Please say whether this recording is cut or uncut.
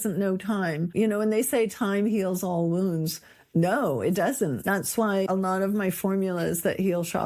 cut